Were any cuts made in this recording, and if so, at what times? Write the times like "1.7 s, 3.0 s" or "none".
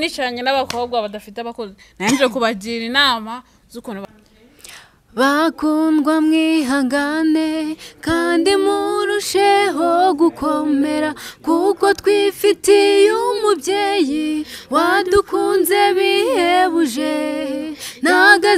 4.1 s